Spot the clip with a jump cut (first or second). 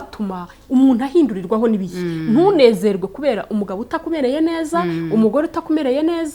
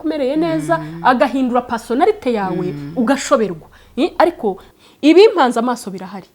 second